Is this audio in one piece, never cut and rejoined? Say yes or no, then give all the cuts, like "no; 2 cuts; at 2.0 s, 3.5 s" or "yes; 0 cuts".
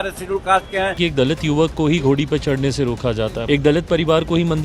no; 2 cuts; at 1.0 s, 3.4 s